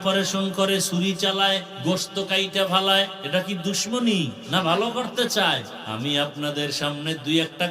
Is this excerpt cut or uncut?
cut